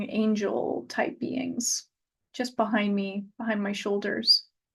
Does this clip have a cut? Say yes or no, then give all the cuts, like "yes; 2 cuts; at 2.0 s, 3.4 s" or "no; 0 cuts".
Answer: no; 0 cuts